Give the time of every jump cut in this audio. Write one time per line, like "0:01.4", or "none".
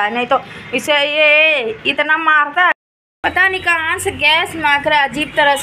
0:02.7